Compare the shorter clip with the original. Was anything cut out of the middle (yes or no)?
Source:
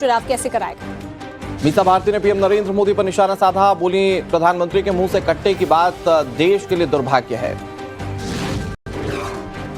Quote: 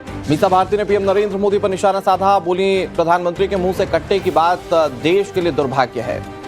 no